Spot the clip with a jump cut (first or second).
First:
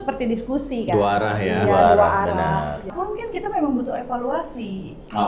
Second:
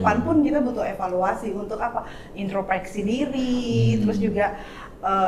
first